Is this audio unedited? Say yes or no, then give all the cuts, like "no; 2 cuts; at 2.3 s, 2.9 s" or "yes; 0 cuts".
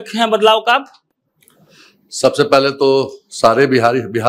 yes; 0 cuts